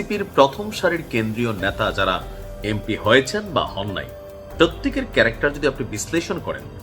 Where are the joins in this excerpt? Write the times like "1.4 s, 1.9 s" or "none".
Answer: none